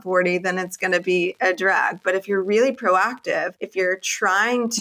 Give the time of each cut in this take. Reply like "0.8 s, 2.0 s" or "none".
3.6 s